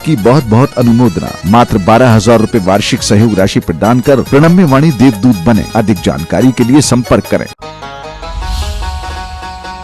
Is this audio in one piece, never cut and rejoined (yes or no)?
no